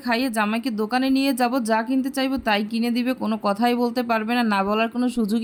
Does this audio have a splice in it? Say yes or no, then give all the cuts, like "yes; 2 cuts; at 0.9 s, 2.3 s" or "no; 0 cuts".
no; 0 cuts